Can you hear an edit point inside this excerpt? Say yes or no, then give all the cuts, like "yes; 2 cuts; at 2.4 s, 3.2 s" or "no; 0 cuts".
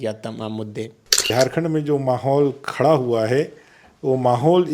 yes; 1 cut; at 1.3 s